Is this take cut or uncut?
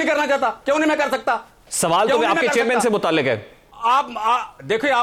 uncut